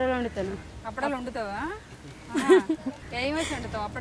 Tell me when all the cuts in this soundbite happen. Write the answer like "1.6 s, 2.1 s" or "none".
3.0 s